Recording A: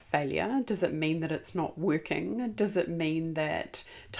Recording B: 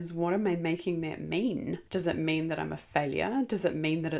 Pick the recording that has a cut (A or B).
B